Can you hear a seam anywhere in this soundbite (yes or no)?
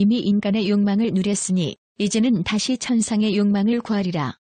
no